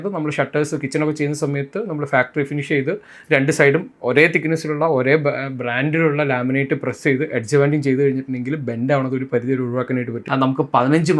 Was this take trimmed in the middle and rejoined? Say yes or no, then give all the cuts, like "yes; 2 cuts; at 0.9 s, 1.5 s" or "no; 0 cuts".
yes; 1 cut; at 10.2 s